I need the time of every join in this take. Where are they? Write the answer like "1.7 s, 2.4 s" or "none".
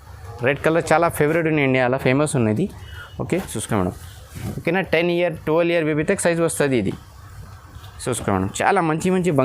3.6 s